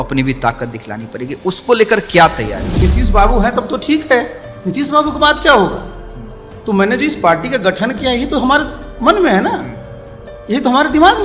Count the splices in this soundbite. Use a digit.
1